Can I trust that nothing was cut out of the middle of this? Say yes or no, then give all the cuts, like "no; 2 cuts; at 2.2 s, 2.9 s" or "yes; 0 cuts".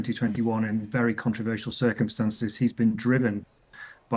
yes; 0 cuts